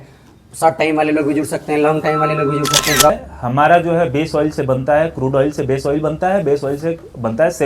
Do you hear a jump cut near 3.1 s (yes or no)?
yes